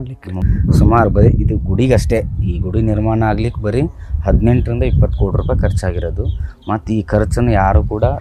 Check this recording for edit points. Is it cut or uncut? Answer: uncut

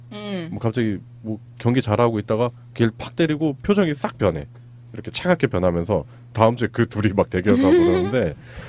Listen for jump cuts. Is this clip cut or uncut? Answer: uncut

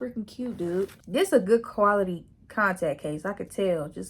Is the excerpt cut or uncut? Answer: cut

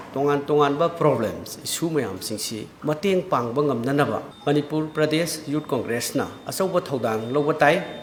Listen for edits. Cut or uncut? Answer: uncut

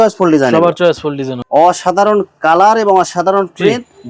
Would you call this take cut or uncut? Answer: cut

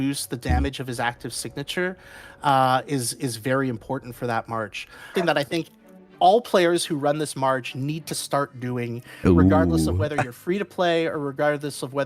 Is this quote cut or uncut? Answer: cut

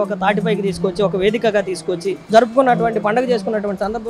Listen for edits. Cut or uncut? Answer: cut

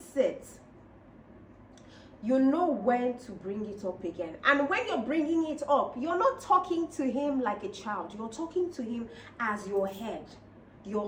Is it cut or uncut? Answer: uncut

